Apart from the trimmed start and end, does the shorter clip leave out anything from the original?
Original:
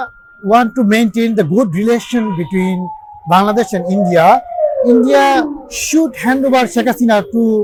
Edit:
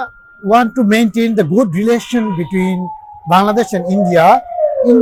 no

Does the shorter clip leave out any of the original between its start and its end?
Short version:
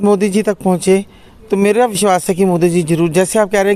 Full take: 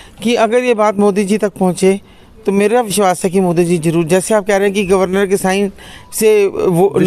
no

